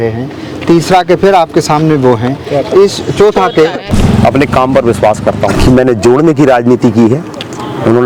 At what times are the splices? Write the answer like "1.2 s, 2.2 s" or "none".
3.9 s, 5.5 s